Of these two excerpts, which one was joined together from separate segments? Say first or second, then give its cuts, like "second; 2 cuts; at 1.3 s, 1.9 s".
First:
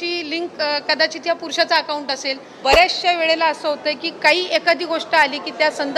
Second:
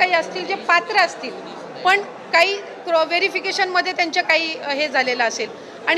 first; 1 cut; at 2.4 s